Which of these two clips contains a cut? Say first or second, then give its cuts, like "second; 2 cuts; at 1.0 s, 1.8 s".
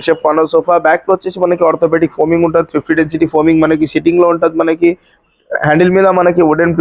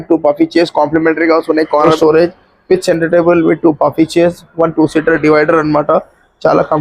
second; 1 cut; at 1.9 s